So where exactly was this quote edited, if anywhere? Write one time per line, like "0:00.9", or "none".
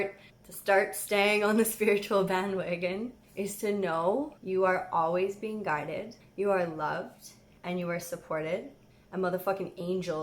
0:03.2
0:04.4